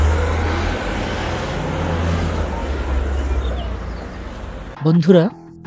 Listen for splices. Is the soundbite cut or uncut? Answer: cut